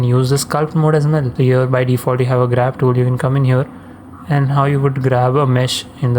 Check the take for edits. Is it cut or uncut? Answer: cut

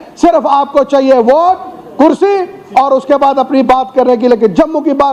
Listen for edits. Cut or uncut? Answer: uncut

